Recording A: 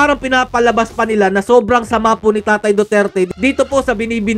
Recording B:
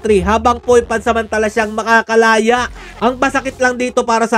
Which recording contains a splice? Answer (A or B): B